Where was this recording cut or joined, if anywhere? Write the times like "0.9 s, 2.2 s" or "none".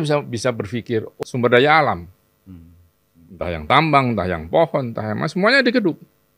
1.2 s

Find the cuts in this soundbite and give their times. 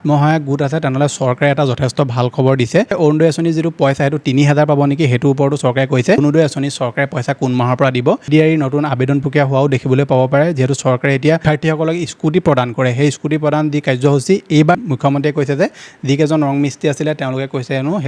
2.9 s, 6.2 s, 8.3 s, 11.4 s, 14.7 s

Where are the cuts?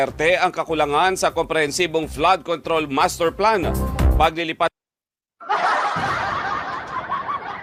none

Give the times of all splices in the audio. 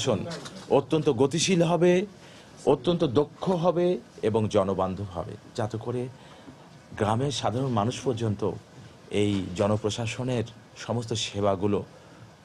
none

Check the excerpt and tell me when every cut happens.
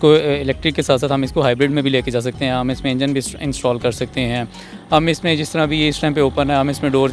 none

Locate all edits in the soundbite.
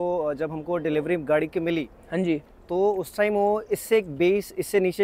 none

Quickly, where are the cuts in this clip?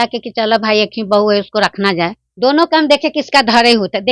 2.2 s

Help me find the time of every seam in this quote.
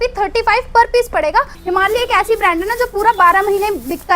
1.6 s

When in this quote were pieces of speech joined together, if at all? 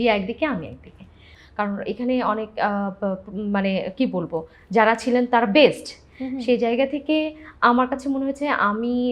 1.0 s

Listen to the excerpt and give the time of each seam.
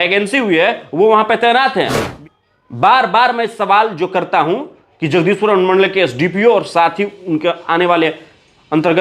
2.0 s

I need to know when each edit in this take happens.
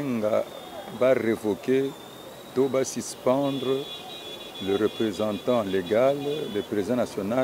none

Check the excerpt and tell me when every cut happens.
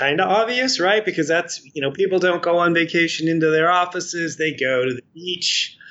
none

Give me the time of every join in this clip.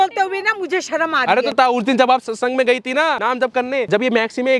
1.5 s, 3.5 s

